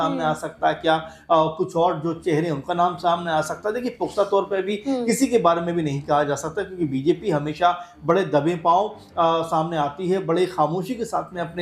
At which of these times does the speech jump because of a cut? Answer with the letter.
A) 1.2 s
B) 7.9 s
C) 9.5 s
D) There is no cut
D